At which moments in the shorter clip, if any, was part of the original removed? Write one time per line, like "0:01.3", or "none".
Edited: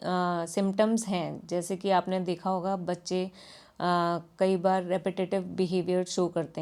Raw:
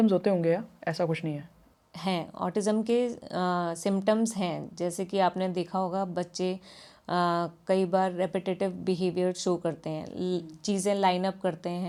none